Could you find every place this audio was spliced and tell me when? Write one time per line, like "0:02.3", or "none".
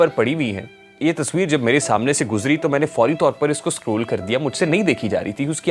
none